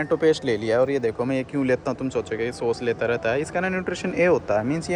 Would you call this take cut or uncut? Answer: uncut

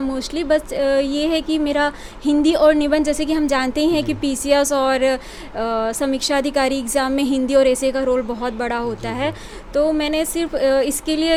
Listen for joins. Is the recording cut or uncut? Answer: uncut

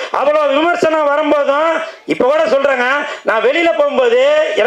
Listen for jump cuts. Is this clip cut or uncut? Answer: uncut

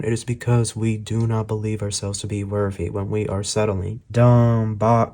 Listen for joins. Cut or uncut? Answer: cut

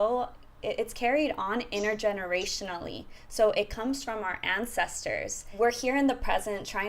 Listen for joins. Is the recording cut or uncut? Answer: cut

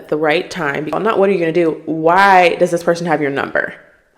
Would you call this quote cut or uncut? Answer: cut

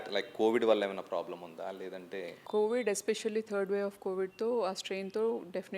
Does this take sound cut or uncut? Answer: cut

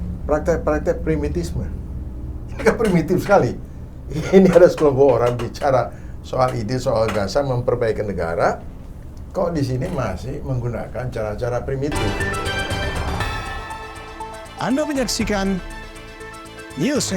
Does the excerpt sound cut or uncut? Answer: cut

